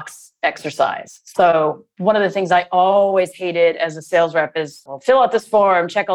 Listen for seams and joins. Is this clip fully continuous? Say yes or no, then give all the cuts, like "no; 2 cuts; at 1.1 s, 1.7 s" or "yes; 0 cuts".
no; 2 cuts; at 1.6 s, 4.8 s